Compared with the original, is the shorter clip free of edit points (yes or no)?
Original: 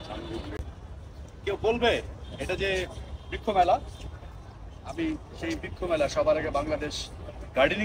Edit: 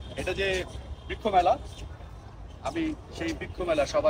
yes